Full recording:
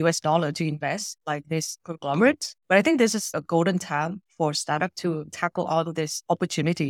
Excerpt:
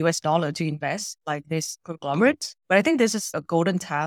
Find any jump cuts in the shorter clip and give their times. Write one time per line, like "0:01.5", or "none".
none

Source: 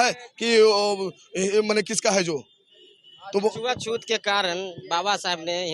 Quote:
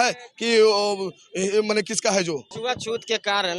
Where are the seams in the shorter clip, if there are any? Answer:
0:02.6

